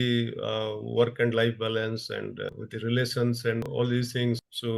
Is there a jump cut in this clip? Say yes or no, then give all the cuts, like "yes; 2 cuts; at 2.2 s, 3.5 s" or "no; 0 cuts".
yes; 2 cuts; at 2.5 s, 3.6 s